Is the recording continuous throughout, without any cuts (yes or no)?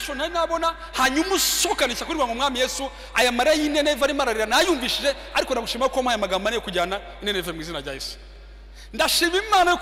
yes